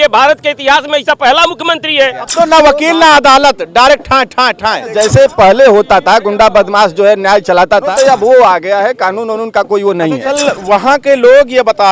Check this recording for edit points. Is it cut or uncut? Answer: cut